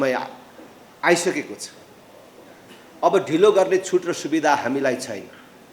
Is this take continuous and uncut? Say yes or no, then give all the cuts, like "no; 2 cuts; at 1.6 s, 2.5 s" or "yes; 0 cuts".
yes; 0 cuts